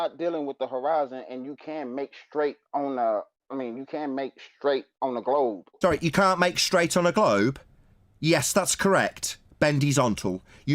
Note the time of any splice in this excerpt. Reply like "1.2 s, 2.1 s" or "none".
5.7 s